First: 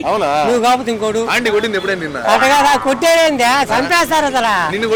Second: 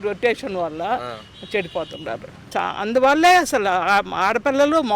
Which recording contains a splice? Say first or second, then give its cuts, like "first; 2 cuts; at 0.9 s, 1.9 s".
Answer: second; 1 cut; at 2.3 s